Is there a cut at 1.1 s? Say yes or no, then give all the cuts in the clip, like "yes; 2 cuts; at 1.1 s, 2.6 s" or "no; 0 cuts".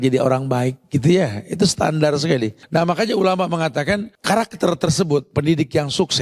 no; 3 cuts; at 2.6 s, 4.1 s, 5.3 s